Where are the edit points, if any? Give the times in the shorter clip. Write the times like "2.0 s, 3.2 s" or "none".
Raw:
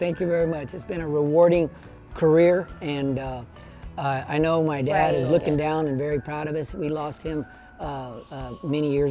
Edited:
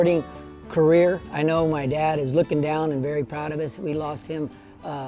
1.3 s